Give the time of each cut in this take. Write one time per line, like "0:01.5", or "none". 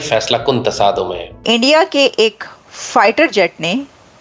0:01.3